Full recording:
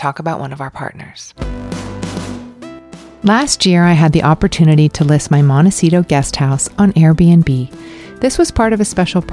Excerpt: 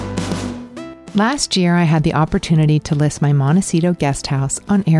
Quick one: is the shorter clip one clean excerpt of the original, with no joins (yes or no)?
no